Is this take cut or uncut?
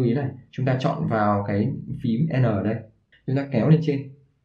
cut